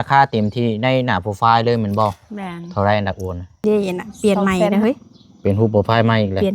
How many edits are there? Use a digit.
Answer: 1